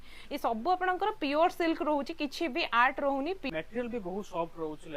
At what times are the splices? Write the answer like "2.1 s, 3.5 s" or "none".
3.5 s